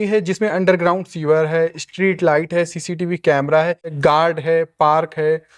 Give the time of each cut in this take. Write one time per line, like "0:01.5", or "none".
0:03.9